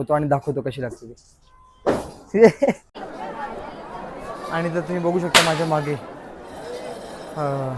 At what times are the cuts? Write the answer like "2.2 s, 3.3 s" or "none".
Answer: 2.9 s